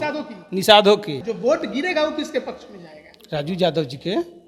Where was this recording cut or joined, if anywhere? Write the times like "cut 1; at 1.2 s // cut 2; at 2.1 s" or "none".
cut 1; at 1.2 s